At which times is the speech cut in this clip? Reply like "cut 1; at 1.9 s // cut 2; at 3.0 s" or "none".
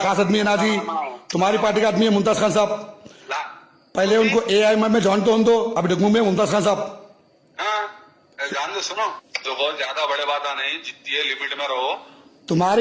cut 1; at 9.3 s